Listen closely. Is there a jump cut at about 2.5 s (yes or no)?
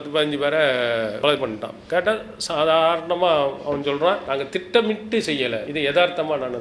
no